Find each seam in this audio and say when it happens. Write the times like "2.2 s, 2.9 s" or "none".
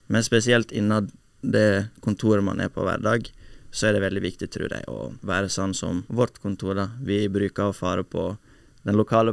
5.1 s, 6.1 s